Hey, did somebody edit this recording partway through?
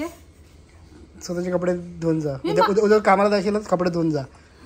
no; 0 cuts

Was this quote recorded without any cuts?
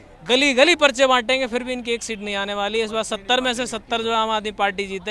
yes; 0 cuts

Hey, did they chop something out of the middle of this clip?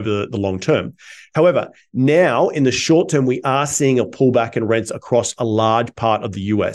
no; 0 cuts

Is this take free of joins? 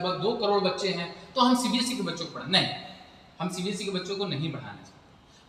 yes; 0 cuts

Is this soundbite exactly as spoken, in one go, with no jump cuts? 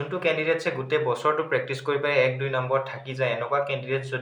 yes; 0 cuts

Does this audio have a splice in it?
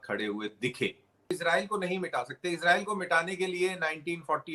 yes; 1 cut; at 1.3 s

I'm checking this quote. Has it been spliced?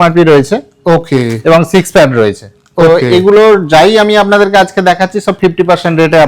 no; 0 cuts

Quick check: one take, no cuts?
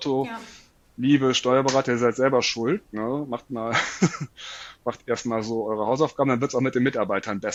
yes; 0 cuts

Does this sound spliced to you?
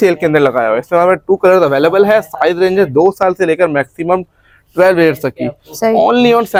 no; 0 cuts

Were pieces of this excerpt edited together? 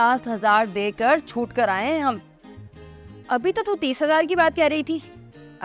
no; 0 cuts

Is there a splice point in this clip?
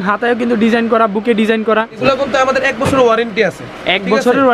yes; 1 cut; at 2.0 s

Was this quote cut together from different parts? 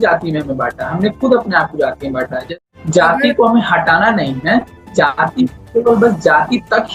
yes; 1 cut; at 2.4 s

